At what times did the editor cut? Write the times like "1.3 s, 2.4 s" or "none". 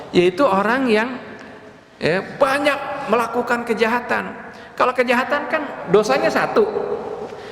5.8 s